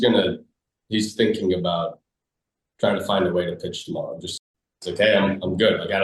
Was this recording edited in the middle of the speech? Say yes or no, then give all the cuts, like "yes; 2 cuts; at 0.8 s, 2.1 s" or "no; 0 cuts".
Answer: yes; 1 cut; at 4.3 s